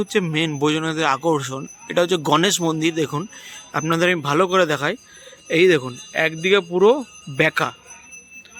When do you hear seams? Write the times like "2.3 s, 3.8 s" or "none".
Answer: none